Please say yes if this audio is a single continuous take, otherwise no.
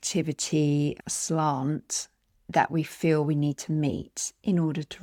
yes